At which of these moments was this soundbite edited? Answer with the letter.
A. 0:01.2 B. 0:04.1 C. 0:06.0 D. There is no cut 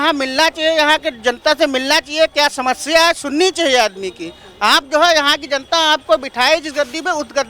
D